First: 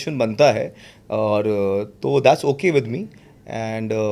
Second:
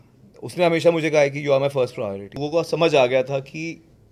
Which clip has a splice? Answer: second; 1 cut; at 2.4 s

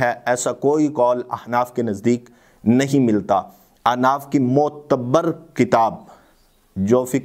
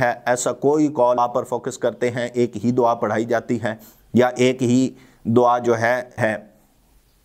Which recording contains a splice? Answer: second; 2 cuts; at 1.2 s, 6.1 s

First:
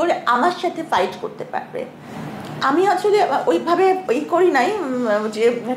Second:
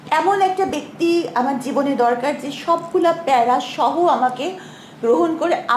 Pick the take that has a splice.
first; 1 cut; at 2.1 s

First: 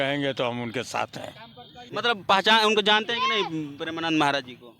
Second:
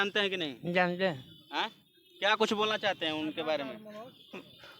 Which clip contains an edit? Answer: first; 1 cut; at 1.9 s

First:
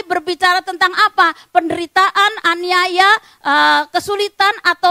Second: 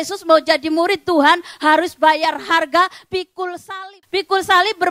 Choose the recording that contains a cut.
second; 1 cut; at 3.7 s

